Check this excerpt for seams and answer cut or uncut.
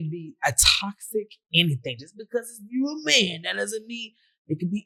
uncut